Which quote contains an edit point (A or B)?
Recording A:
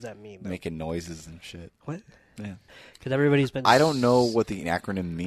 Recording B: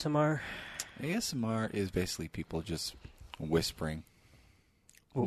A